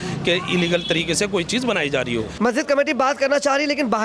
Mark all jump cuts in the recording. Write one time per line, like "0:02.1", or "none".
0:02.3